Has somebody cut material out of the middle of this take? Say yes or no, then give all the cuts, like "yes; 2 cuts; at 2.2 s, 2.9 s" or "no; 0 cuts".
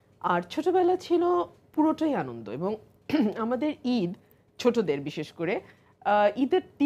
no; 0 cuts